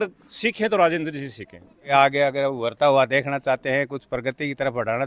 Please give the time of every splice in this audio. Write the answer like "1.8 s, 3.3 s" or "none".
1.9 s